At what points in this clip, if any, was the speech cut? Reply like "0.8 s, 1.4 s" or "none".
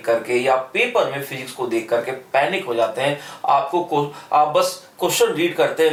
none